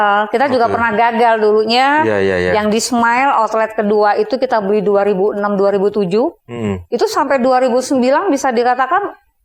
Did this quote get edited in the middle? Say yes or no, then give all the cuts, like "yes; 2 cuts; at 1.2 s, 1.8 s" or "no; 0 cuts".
no; 0 cuts